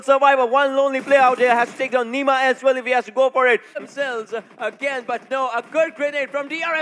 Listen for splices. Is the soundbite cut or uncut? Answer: cut